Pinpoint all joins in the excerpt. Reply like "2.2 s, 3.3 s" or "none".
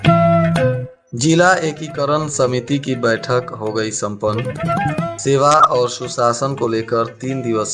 0.9 s